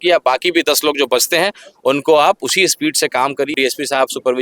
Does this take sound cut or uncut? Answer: cut